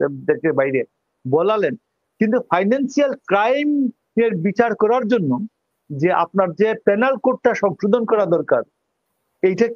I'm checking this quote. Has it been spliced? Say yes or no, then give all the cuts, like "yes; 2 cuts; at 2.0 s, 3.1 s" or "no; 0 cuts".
no; 0 cuts